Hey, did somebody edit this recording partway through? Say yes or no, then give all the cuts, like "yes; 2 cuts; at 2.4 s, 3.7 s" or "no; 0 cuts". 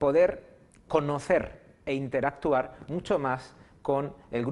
yes; 1 cut; at 3.1 s